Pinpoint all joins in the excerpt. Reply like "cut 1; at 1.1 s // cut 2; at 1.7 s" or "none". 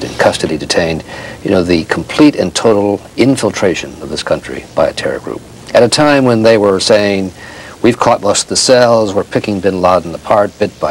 none